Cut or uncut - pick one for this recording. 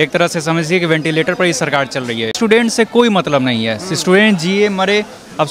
cut